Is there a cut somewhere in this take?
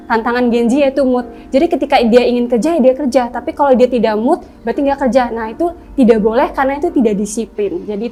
no; 0 cuts

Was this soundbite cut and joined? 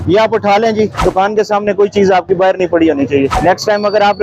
yes; 2 cuts; at 0.9 s, 3.3 s

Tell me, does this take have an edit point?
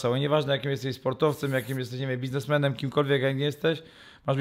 no; 0 cuts

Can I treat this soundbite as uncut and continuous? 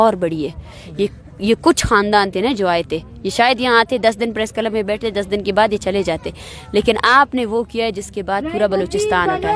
yes; 0 cuts

